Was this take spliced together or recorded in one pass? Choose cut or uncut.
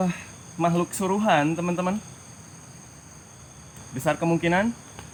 uncut